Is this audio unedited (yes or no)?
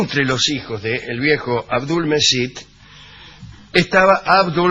no